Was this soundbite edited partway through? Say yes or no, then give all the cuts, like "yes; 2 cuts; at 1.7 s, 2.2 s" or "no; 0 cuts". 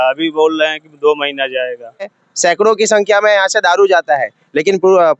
yes; 1 cut; at 2.2 s